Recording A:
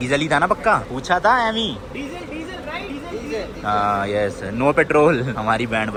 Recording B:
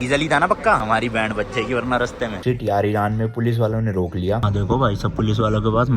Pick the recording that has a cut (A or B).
B